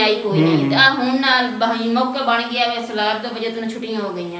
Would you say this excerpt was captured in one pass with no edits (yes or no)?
yes